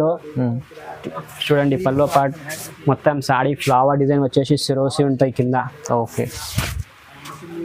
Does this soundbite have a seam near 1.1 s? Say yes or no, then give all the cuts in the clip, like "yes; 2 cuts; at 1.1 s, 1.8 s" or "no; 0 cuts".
no; 0 cuts